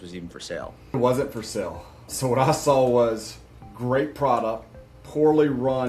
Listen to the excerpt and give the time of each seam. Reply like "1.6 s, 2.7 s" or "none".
0.9 s